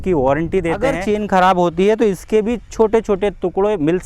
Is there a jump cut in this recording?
yes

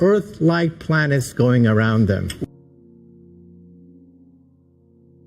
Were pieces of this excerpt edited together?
yes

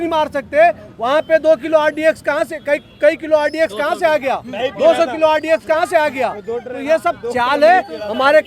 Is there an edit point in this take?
no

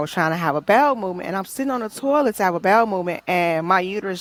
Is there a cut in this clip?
no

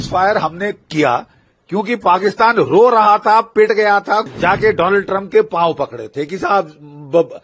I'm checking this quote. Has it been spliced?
yes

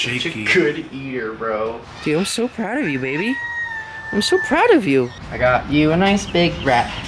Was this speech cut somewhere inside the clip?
yes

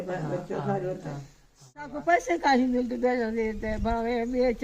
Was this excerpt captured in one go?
no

